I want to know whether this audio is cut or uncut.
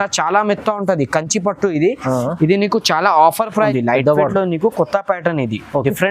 cut